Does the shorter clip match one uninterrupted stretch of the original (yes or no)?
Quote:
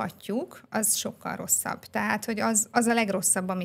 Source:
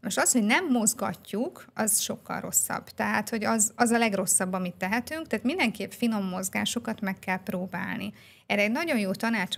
yes